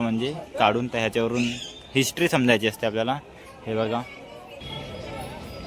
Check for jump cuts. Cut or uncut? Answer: cut